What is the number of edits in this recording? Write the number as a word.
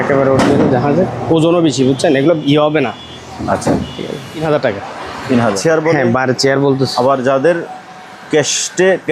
two